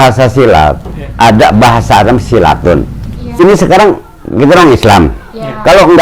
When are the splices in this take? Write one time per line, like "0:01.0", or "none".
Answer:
0:03.4